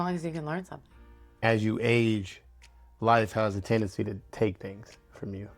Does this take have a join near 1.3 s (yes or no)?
yes